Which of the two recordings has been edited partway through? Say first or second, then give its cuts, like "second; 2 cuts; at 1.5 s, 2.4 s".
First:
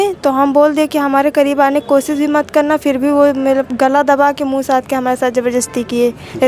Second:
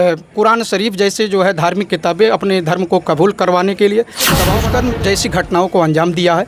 second; 1 cut; at 4.5 s